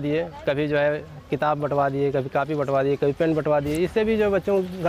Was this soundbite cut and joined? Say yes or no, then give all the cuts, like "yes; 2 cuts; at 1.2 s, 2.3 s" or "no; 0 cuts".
no; 0 cuts